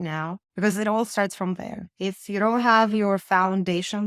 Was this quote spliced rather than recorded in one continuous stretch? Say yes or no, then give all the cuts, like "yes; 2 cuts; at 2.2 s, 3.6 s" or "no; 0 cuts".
no; 0 cuts